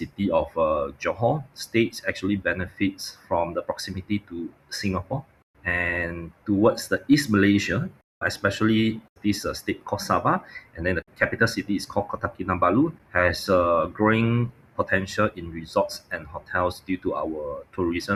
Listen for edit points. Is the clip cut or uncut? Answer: uncut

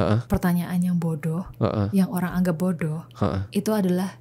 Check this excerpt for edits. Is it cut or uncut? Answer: uncut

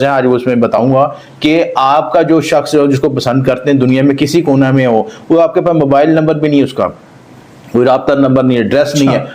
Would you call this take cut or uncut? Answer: uncut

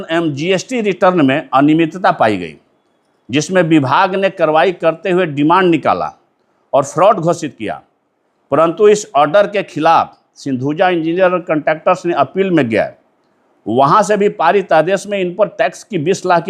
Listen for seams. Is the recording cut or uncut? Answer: uncut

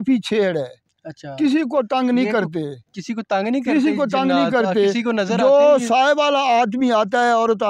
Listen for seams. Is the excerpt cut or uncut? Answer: uncut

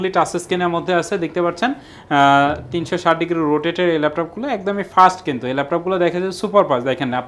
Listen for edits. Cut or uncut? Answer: uncut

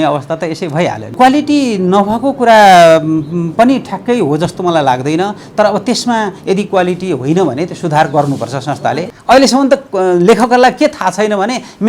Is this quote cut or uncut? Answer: cut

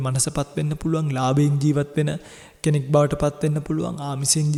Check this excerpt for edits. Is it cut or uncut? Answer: uncut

